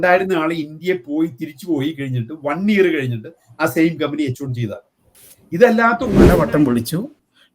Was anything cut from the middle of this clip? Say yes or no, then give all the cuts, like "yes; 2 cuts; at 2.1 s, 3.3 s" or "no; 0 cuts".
yes; 1 cut; at 6.3 s